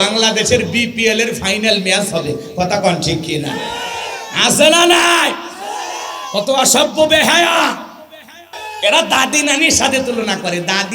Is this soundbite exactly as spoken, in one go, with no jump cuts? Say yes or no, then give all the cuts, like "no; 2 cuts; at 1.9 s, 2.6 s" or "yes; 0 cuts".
no; 1 cut; at 8.6 s